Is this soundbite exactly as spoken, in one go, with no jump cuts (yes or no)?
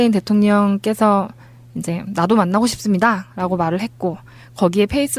yes